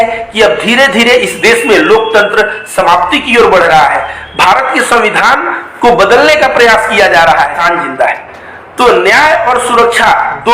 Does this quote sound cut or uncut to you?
cut